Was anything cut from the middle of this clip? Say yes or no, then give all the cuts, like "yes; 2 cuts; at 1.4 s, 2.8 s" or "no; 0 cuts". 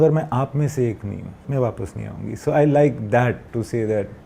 yes; 2 cuts; at 1.3 s, 3.4 s